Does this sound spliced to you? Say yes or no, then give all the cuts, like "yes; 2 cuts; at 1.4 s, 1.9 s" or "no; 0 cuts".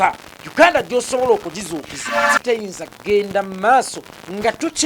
yes; 1 cut; at 2.3 s